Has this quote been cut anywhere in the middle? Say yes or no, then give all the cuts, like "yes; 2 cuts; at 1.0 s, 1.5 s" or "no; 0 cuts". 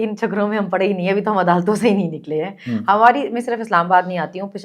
no; 0 cuts